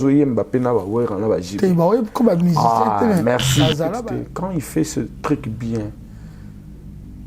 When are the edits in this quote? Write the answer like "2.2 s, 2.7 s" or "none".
3.9 s